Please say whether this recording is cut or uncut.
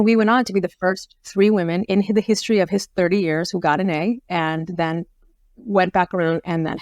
cut